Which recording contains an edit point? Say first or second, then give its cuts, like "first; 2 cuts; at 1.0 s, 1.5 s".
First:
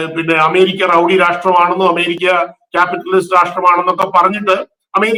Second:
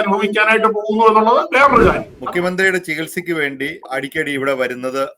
second; 2 cuts; at 2.1 s, 3.9 s